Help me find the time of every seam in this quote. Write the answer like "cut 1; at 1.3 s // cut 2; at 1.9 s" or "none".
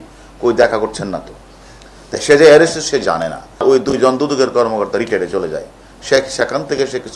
cut 1; at 3.6 s